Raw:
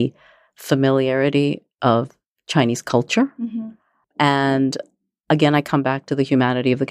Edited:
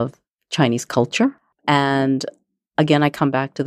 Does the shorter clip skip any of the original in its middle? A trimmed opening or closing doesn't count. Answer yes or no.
yes